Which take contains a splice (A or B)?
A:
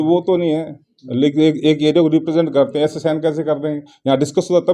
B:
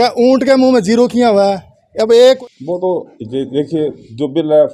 B